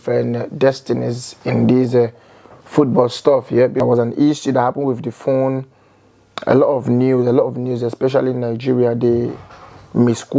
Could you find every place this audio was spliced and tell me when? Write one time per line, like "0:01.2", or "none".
0:03.8